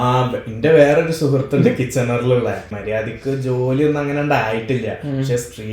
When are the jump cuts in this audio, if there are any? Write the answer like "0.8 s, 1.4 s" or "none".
2.8 s

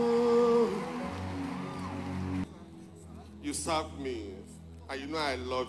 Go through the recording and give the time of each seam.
2.4 s

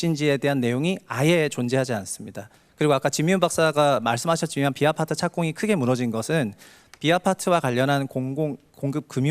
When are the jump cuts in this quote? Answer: none

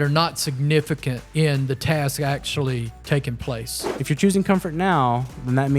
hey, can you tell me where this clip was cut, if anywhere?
1.2 s, 2.9 s, 4.0 s

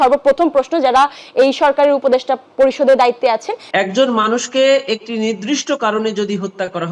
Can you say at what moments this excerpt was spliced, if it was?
3.6 s

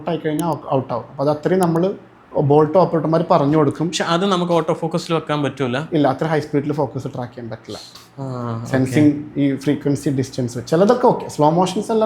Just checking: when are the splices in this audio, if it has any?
none

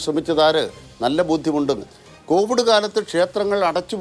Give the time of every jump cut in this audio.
1.9 s

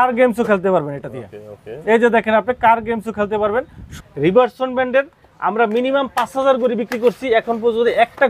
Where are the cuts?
3.9 s

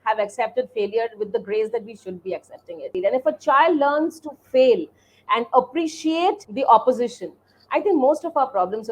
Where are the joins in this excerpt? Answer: 2.9 s, 6.5 s

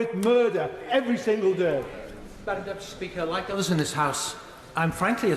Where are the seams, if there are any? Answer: 1.9 s

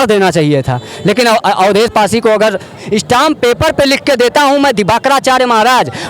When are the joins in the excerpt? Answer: 2.8 s

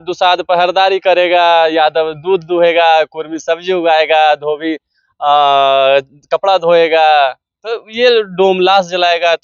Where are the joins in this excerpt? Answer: none

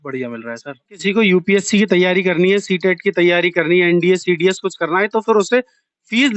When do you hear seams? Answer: 1.0 s

